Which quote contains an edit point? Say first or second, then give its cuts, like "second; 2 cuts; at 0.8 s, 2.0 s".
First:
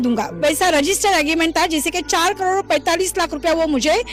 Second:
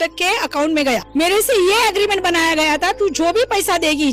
second; 1 cut; at 1.1 s